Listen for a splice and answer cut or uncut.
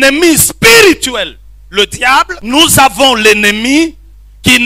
cut